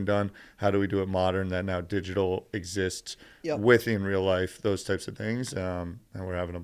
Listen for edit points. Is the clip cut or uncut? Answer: uncut